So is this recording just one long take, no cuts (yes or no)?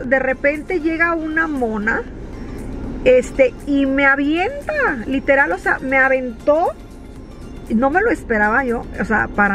yes